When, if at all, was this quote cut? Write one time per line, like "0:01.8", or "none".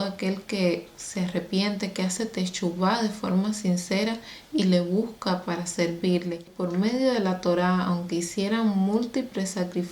0:06.5